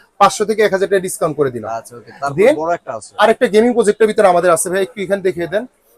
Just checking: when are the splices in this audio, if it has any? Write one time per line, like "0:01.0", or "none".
none